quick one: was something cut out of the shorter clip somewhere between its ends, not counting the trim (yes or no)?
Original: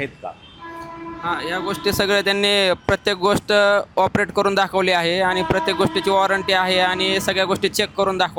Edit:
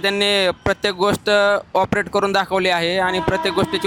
no